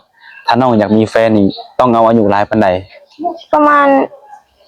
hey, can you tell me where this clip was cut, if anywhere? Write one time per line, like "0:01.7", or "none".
none